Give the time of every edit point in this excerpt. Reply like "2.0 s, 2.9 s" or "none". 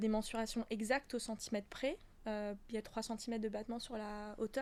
none

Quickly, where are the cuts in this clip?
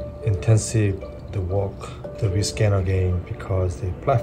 1.2 s, 2.0 s

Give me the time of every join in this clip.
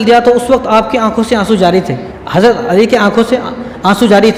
none

